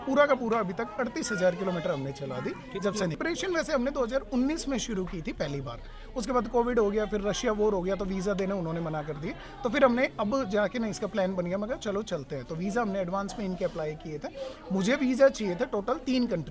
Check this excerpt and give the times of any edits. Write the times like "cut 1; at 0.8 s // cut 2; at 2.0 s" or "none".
cut 1; at 3.2 s